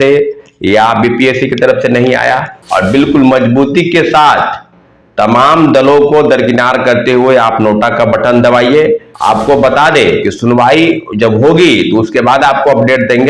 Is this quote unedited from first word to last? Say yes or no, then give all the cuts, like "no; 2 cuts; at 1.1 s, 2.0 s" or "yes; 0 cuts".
no; 2 cuts; at 2.6 s, 9.1 s